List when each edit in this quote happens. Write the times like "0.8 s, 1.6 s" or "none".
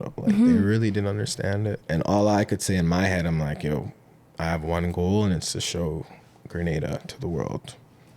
1.8 s

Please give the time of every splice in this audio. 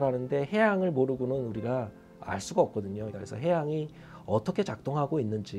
3.1 s

